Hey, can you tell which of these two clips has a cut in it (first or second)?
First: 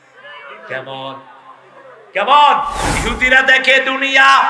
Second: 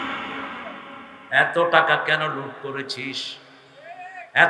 first